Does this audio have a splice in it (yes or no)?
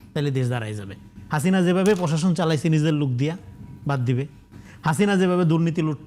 no